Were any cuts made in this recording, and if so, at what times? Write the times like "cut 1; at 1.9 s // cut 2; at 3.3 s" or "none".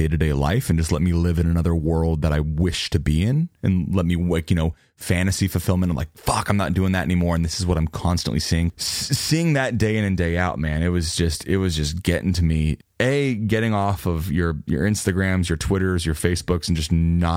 cut 1; at 8.7 s // cut 2; at 12.8 s